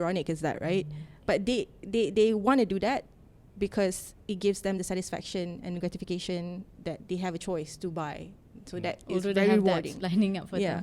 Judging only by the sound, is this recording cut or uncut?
uncut